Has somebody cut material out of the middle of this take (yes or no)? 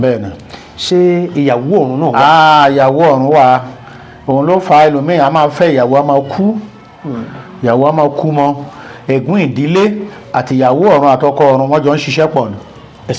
no